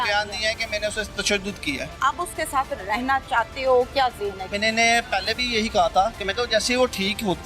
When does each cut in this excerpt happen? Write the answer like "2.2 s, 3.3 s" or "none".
1.9 s, 4.5 s